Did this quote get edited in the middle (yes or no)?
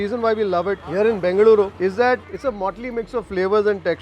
yes